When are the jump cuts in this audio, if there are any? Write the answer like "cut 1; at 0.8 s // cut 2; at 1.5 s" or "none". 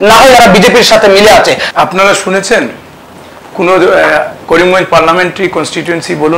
cut 1; at 1.6 s